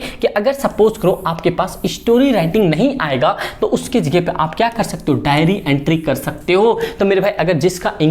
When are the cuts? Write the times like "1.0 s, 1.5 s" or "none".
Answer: none